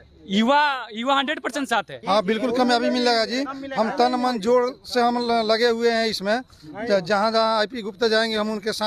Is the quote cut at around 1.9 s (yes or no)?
yes